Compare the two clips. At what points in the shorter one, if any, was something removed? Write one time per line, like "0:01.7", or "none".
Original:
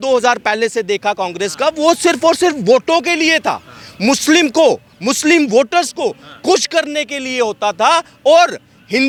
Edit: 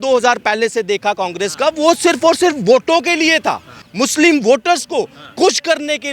0:03.8